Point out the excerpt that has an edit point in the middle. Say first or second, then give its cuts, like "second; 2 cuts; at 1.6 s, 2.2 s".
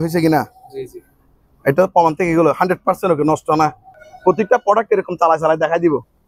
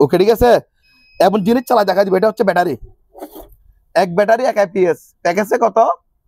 first; 1 cut; at 4.0 s